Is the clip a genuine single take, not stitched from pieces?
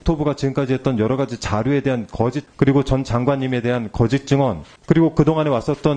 no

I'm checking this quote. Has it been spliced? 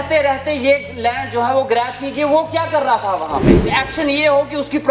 yes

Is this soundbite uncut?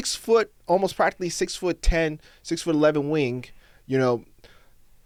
yes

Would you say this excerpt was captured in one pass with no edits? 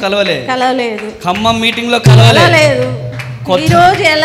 yes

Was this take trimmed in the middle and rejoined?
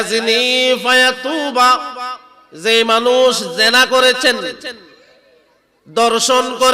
no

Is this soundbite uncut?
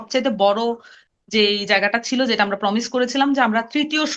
yes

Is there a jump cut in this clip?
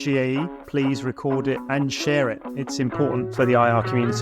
yes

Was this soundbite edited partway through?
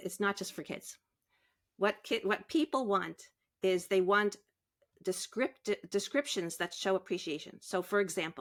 no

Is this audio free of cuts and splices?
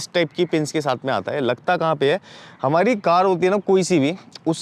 yes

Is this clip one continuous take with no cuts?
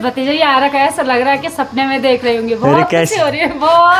yes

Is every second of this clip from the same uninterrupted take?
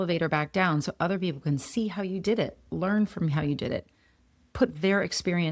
yes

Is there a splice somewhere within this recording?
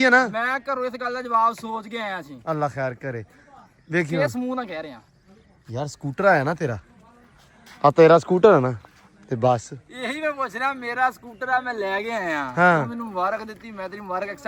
no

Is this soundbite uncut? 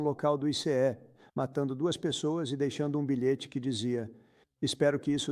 yes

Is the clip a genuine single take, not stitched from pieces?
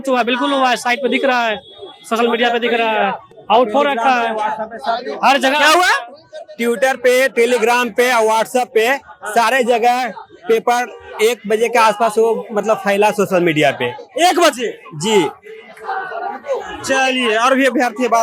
yes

